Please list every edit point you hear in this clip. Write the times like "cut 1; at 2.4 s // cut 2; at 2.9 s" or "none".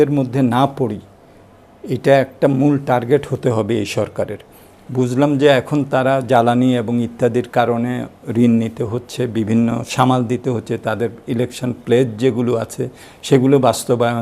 none